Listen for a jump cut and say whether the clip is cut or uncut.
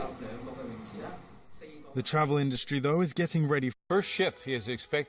uncut